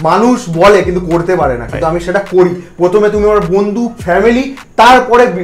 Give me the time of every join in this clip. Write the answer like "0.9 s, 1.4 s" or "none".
none